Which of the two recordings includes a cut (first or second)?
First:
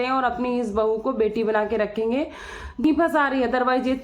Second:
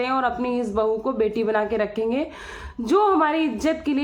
first